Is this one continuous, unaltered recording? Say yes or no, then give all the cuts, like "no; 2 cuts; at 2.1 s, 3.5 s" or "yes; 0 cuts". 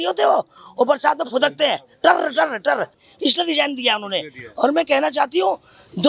no; 1 cut; at 3.0 s